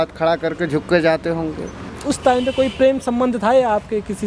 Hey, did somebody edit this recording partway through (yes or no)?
yes